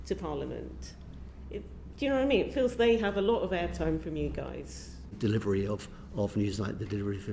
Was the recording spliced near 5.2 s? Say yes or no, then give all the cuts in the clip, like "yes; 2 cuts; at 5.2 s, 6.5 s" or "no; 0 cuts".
yes; 1 cut; at 5.2 s